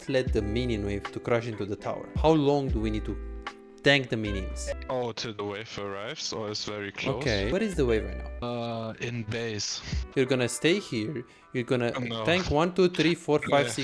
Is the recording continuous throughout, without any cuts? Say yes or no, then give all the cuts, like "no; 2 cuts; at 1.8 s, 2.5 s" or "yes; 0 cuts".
no; 5 cuts; at 2.1 s, 4.7 s, 7.5 s, 8.4 s, 10.0 s